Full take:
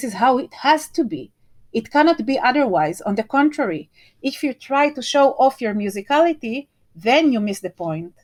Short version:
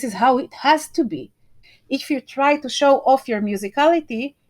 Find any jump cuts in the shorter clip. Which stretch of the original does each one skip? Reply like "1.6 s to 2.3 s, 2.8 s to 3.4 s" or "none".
1.6 s to 3.9 s